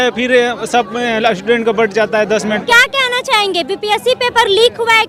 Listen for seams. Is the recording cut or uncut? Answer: uncut